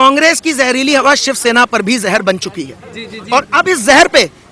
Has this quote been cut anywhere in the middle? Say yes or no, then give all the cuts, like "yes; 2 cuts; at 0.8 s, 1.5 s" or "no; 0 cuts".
no; 0 cuts